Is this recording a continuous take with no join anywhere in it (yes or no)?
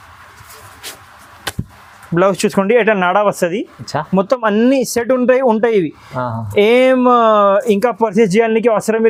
yes